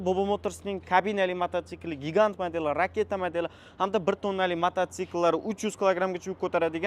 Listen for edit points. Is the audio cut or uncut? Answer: uncut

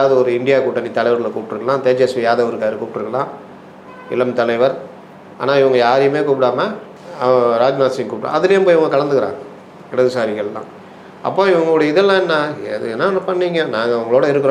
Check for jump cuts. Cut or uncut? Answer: uncut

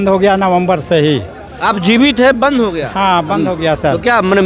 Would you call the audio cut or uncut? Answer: uncut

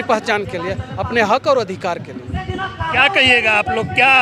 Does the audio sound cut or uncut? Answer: uncut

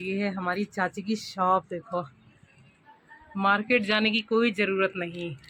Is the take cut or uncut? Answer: uncut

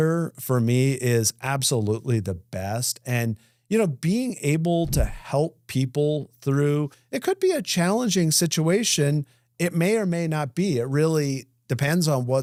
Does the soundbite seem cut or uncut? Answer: uncut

